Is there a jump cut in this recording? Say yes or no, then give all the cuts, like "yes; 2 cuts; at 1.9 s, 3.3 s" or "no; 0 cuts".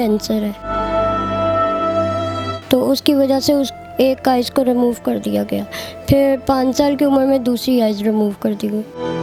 no; 0 cuts